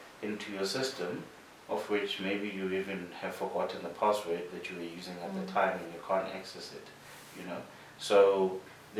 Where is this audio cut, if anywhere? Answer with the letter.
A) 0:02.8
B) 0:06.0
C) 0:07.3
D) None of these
D